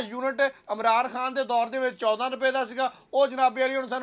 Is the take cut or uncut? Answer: uncut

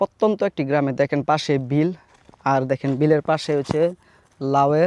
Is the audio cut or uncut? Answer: uncut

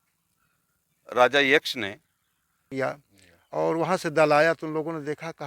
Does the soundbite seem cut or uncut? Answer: cut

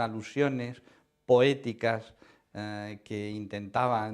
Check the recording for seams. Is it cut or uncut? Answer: cut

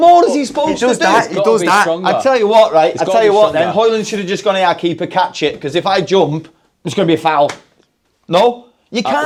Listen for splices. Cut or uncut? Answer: uncut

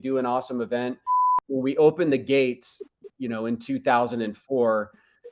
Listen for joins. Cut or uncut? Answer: cut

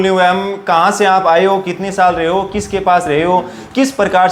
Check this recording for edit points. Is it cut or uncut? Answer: uncut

